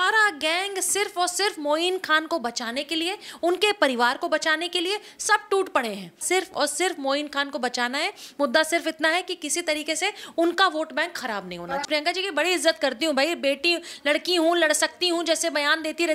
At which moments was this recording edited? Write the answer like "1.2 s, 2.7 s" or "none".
6.2 s, 11.8 s